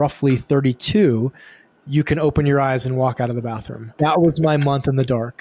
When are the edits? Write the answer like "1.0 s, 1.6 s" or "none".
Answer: 3.9 s